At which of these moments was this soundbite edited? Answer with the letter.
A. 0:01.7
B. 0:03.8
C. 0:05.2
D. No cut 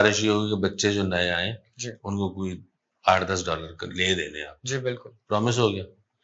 D